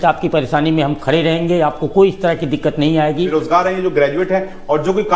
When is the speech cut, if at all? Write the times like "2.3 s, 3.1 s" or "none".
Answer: 3.3 s